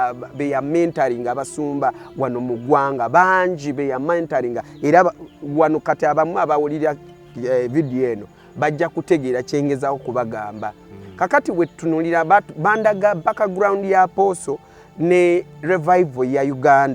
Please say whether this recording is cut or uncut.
uncut